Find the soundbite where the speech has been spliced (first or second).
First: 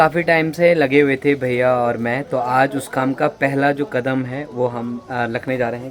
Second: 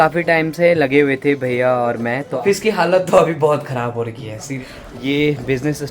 second